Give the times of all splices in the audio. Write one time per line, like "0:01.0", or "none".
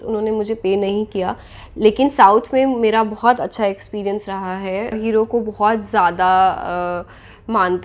0:05.0